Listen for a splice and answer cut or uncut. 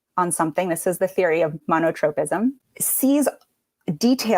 cut